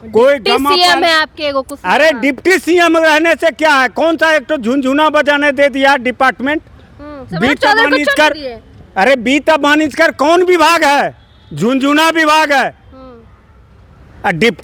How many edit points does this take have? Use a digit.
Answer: 0